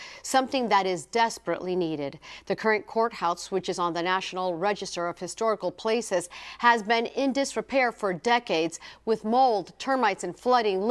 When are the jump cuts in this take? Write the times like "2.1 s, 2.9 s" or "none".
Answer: 8.2 s